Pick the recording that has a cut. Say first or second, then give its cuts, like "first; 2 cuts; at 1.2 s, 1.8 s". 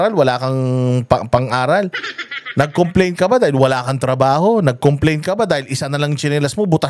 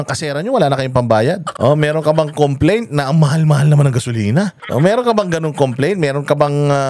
second; 2 cuts; at 1.5 s, 4.6 s